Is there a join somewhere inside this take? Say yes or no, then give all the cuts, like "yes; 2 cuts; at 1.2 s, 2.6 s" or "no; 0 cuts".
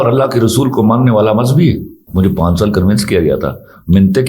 yes; 1 cut; at 2.0 s